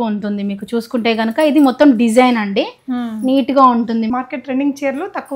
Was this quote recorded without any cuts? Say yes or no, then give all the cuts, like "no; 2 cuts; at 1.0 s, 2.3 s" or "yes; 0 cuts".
no; 1 cut; at 4.1 s